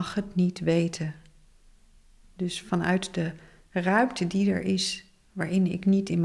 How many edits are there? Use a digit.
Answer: 0